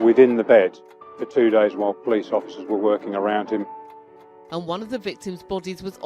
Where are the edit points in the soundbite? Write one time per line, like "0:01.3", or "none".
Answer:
0:03.8